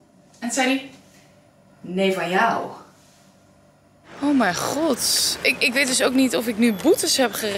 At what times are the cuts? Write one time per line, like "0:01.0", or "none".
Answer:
0:04.0